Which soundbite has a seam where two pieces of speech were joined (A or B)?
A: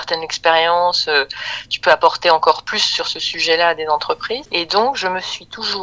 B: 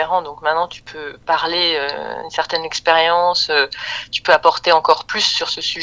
A